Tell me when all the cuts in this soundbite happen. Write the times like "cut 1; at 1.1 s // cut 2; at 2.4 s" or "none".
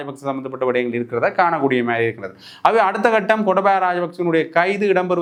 none